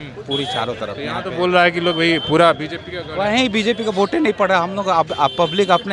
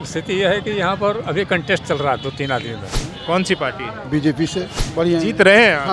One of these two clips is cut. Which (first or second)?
second